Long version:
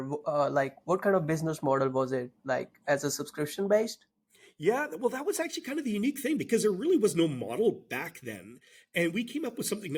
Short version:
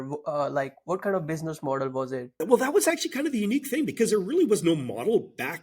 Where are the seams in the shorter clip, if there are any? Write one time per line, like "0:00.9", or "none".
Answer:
0:02.4